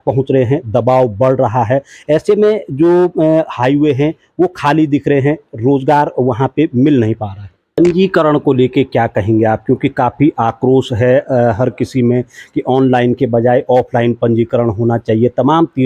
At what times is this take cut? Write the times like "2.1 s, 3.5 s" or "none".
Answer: 7.8 s